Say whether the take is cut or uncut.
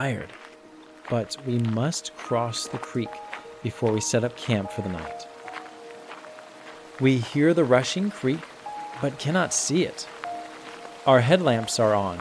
uncut